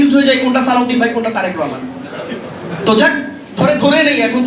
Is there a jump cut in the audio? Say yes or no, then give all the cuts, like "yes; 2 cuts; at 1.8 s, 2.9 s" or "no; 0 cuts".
no; 0 cuts